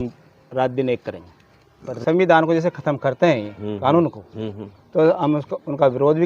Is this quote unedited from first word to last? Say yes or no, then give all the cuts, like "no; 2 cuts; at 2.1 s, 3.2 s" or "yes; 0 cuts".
no; 1 cut; at 1.9 s